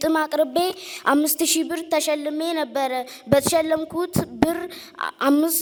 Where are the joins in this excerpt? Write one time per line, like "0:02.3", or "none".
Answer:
none

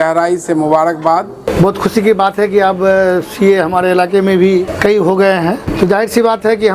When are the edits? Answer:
0:01.4
0:04.7
0:05.7

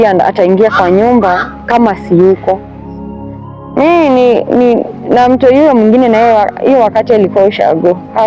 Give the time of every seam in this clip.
none

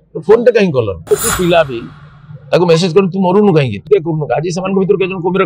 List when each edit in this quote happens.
0:01.1

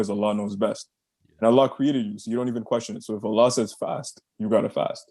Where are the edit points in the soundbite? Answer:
none

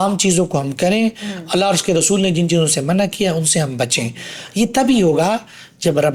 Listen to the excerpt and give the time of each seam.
none

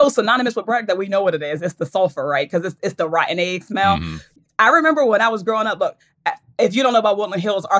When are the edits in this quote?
none

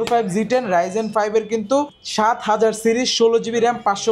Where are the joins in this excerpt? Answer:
0:02.0

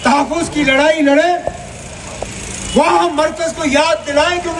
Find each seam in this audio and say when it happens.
none

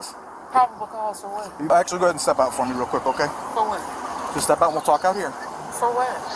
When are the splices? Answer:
0:01.7

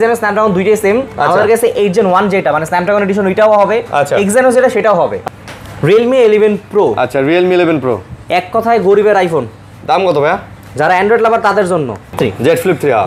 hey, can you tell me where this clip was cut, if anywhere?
0:05.2
0:12.2

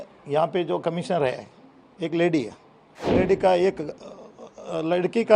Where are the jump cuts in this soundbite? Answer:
0:03.1

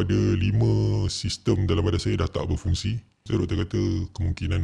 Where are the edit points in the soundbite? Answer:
0:03.2

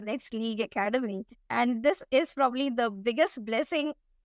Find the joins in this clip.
none

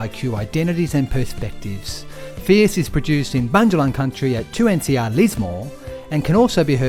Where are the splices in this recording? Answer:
none

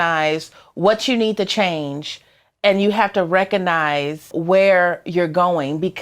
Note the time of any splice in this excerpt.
0:04.3

